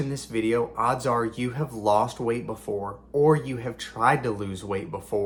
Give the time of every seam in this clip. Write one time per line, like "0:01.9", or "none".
none